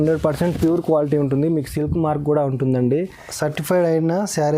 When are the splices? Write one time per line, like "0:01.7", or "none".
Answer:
0:03.3